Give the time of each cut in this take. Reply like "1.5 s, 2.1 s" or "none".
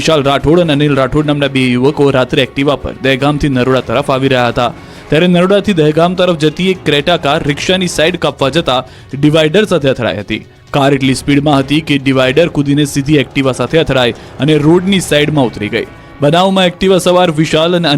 13.6 s